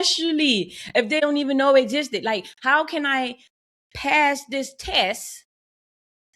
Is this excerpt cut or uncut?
cut